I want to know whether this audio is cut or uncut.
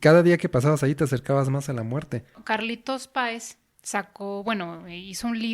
cut